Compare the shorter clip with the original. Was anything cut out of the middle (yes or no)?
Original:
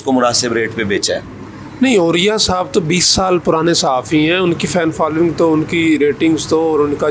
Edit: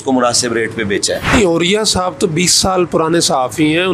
yes